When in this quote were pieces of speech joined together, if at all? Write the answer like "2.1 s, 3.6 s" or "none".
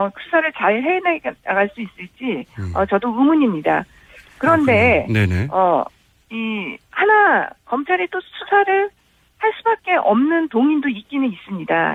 none